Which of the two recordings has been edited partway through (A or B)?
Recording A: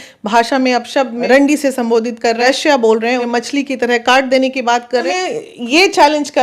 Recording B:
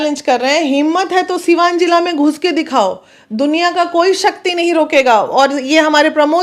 A